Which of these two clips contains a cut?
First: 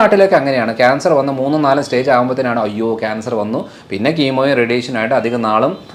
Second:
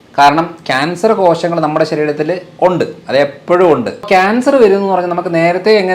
second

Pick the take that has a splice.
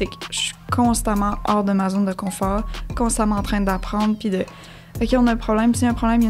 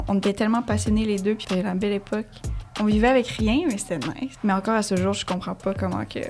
second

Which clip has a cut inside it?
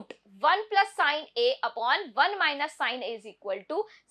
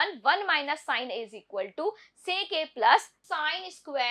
second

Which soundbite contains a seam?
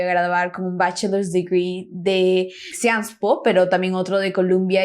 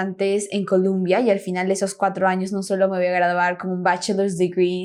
first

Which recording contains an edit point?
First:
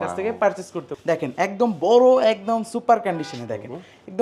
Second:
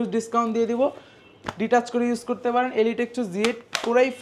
first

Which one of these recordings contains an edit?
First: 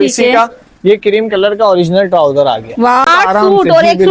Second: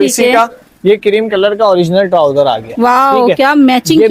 first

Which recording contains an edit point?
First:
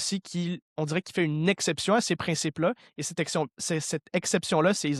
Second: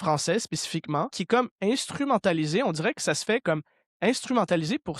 second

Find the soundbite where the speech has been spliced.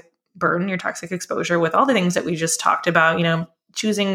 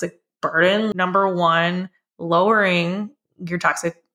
second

